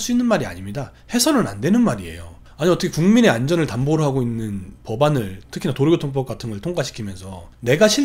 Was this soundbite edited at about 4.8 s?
no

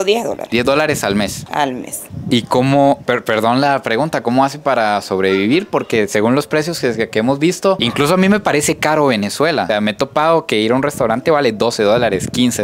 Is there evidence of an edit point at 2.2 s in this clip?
no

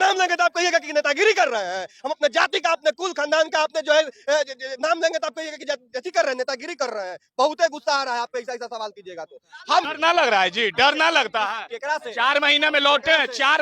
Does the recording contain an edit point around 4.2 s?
no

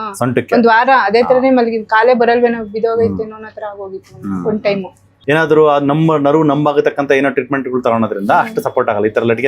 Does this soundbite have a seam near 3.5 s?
no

